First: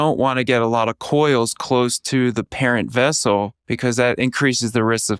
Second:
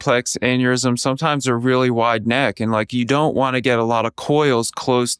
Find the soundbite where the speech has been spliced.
first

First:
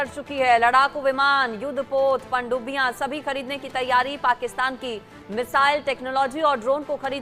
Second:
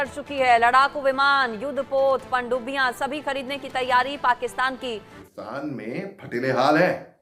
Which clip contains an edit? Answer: second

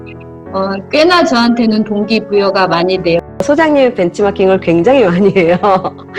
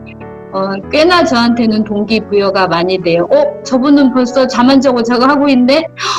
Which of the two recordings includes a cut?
first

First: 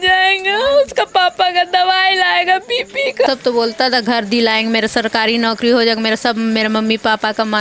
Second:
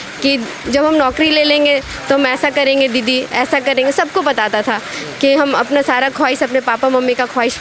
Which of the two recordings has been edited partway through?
first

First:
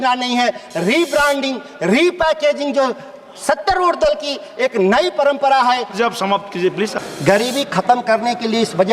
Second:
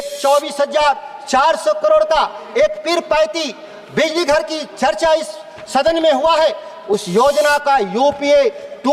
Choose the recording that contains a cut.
first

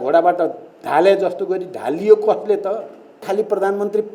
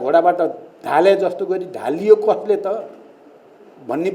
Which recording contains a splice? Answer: first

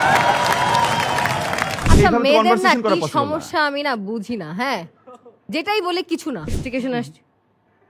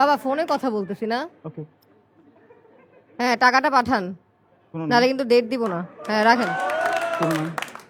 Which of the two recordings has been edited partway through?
first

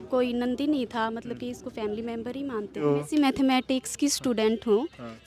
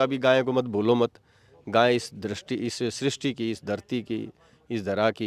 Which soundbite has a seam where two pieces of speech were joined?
first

